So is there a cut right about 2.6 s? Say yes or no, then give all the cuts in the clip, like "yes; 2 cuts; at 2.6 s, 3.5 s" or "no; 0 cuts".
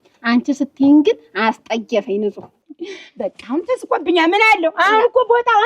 yes; 1 cut; at 2.6 s